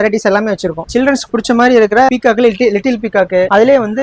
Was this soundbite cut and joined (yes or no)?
no